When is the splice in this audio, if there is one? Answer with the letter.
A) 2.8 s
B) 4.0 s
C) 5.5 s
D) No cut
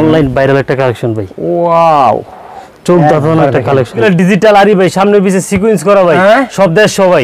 B